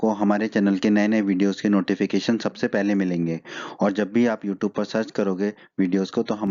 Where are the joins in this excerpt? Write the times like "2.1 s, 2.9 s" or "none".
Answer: 1.1 s